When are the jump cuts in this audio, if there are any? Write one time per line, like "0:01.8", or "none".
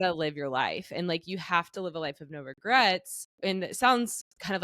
0:03.2